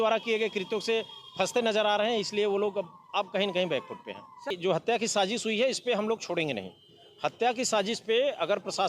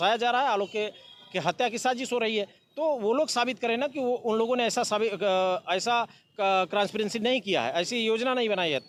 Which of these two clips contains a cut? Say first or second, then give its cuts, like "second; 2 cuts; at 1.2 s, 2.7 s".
first; 1 cut; at 4.5 s